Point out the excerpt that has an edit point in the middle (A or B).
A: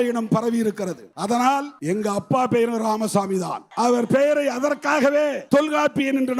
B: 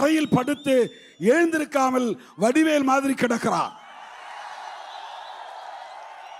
A